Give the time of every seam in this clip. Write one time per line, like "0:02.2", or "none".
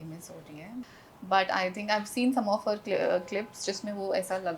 0:01.0